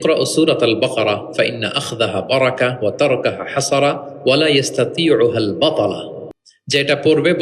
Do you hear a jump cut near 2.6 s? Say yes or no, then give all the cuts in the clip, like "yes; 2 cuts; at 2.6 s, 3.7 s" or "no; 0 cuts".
no; 0 cuts